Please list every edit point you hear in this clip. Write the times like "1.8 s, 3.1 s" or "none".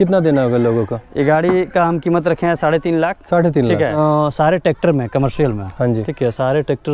4.0 s